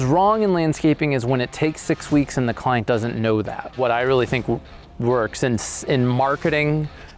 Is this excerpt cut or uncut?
cut